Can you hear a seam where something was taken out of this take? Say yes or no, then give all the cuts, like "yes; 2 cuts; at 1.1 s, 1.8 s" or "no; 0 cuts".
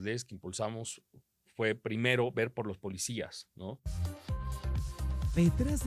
yes; 1 cut; at 3.9 s